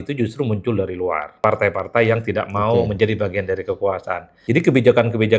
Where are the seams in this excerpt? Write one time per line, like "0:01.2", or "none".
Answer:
0:01.4
0:04.3